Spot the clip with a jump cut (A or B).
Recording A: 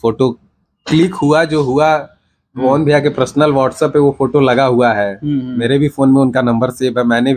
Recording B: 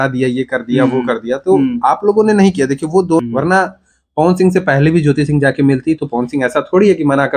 B